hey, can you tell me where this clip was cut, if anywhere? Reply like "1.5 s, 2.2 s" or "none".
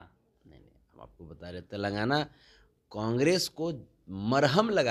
none